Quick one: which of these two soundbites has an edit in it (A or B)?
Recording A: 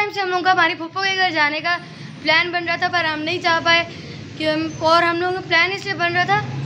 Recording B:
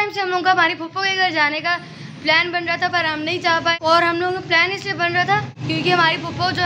B